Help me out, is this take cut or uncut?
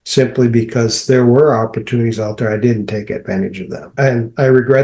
cut